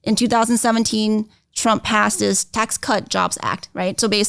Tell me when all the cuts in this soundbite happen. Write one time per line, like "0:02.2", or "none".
0:02.5